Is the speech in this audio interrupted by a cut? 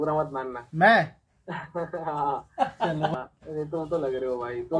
yes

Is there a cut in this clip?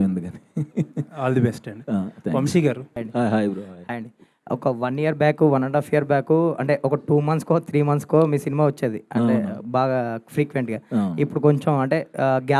yes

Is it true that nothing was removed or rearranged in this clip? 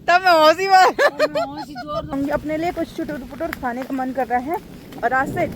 no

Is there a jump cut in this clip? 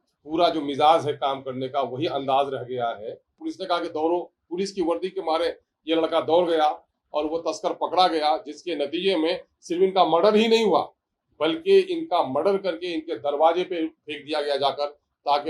yes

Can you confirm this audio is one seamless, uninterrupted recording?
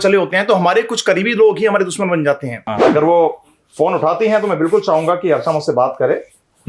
no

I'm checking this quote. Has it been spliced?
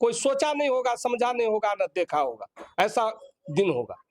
no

